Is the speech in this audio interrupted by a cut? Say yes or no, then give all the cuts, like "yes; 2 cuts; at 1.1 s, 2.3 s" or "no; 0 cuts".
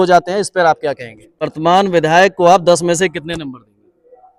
yes; 1 cut; at 1.5 s